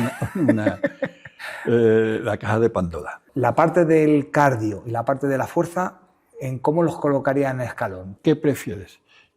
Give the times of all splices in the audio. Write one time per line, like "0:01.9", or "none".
0:03.2
0:08.1